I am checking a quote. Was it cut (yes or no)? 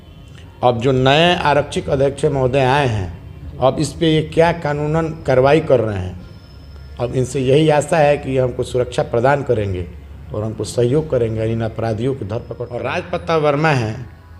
yes